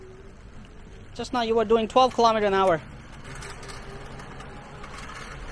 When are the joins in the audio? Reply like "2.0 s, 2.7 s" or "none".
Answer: 3.2 s